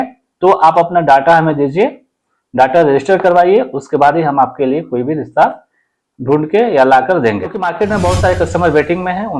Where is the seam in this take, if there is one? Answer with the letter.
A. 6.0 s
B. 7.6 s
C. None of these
B